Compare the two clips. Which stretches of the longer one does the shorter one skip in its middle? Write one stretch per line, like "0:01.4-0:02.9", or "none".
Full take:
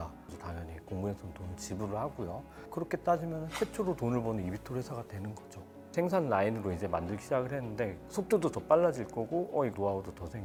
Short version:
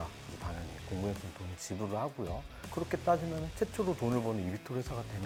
none